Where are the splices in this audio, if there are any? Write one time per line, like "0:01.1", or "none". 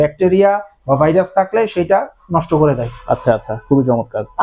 none